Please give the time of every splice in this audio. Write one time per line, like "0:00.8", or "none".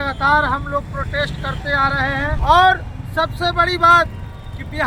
0:02.3